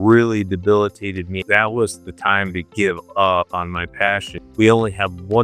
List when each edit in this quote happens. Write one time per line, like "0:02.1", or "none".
0:01.4
0:04.4